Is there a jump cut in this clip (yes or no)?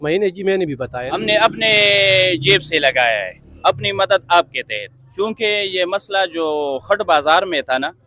yes